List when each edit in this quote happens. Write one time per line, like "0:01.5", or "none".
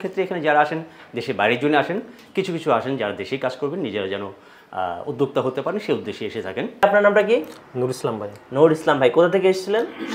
0:06.8